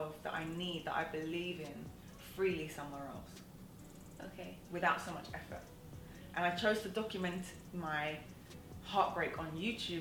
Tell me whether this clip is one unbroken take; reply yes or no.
yes